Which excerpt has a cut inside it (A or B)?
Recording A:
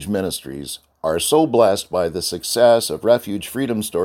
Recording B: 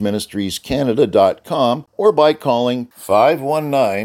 B